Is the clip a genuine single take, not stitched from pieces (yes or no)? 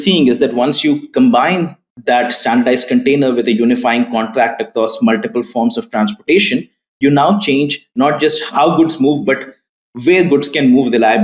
yes